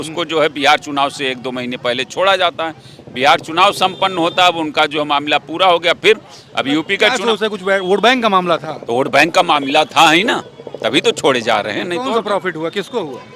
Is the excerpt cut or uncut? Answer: uncut